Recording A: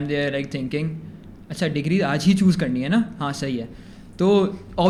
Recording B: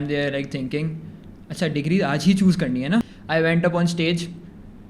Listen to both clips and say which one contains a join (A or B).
B